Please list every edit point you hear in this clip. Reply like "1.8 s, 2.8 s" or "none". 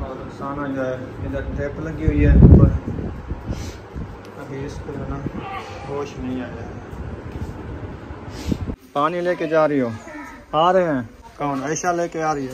8.8 s, 11.2 s